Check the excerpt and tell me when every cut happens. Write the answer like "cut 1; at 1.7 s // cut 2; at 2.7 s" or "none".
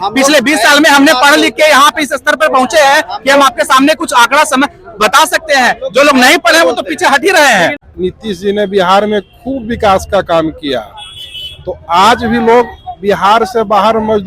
cut 1; at 7.8 s

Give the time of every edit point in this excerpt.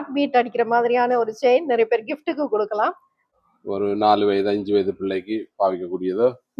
cut 1; at 3.2 s

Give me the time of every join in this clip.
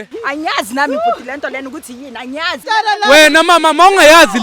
cut 1; at 2.6 s

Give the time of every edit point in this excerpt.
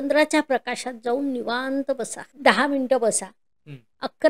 cut 1; at 2.2 s

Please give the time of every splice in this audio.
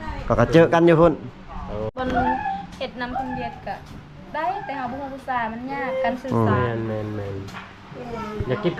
cut 1; at 1.9 s

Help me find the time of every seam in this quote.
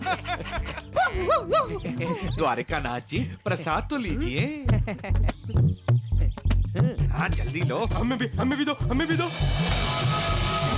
cut 1; at 1.9 s // cut 2; at 7.0 s

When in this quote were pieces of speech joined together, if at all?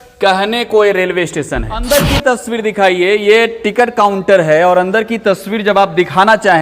cut 1; at 1.8 s

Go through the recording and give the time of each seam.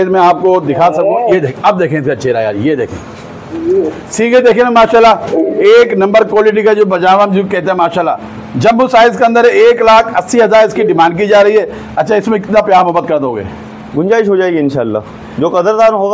none

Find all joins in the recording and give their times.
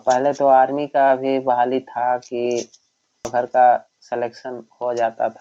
cut 1; at 3.3 s

